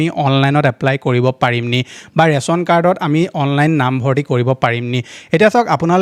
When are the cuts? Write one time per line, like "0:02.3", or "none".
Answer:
none